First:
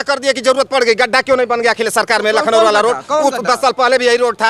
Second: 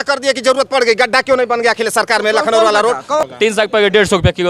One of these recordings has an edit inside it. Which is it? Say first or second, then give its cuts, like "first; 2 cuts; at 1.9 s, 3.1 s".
second; 1 cut; at 3.2 s